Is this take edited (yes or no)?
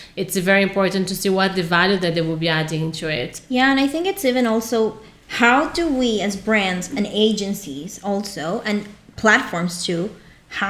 no